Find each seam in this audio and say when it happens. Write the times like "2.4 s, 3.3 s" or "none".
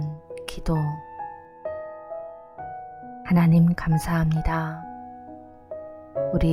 1.0 s, 3.2 s